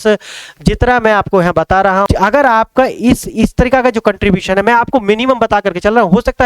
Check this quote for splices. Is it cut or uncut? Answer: cut